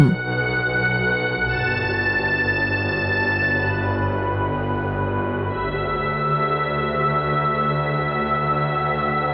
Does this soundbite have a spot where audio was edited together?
no; 0 cuts

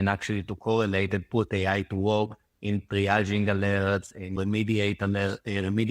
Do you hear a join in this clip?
yes; 1 cut; at 4.4 s

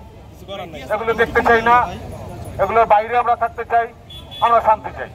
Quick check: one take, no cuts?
yes; 0 cuts

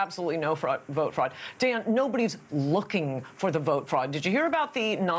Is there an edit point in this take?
yes; 1 cut; at 1.4 s

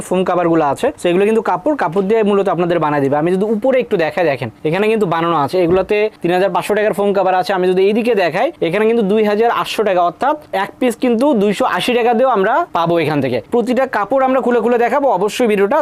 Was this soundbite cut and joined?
no; 0 cuts

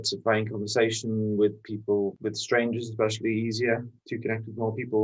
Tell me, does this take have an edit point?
no; 0 cuts

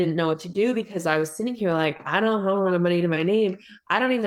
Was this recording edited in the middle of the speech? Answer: no; 0 cuts

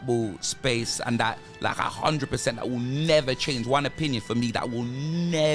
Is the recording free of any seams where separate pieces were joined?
yes; 0 cuts

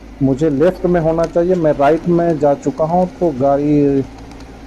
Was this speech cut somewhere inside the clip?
no; 0 cuts

